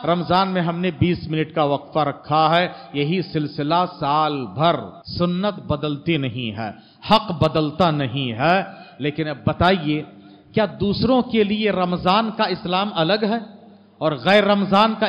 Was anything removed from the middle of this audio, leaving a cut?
yes; 1 cut; at 5.0 s

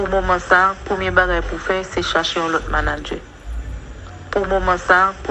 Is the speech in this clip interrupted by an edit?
yes; 1 cut; at 4.2 s

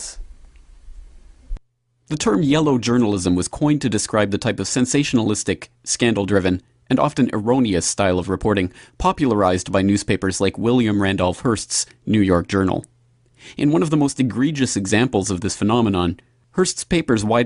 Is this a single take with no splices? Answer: yes; 0 cuts

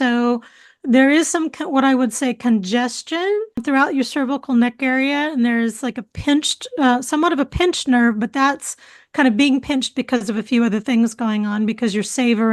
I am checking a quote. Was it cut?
no; 0 cuts

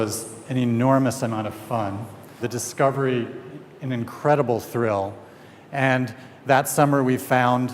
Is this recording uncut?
no; 1 cut; at 1.4 s

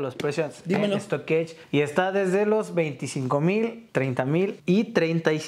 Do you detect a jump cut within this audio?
yes; 2 cuts; at 1.6 s, 4.3 s

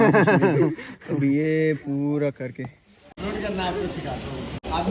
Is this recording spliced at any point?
yes; 1 cut; at 3.1 s

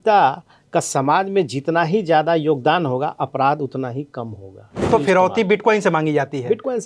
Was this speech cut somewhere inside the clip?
yes; 1 cut; at 4.9 s

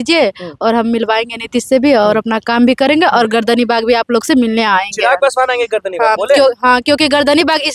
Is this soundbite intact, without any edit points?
yes; 0 cuts

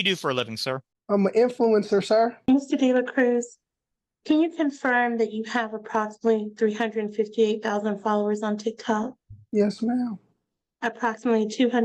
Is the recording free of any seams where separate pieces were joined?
no; 2 cuts; at 0.9 s, 2.5 s

